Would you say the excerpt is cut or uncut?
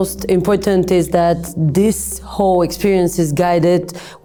uncut